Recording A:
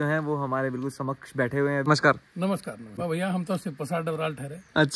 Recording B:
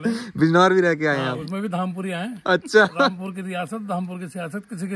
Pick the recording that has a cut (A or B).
A